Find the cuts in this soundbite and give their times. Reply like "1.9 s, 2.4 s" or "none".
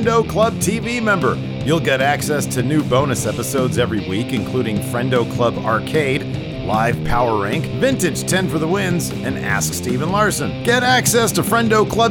none